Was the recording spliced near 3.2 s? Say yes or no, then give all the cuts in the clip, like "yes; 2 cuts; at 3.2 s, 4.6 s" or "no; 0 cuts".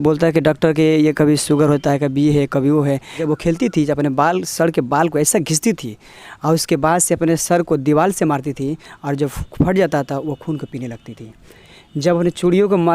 yes; 1 cut; at 3.2 s